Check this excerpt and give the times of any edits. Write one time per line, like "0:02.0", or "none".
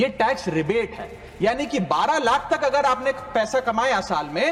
none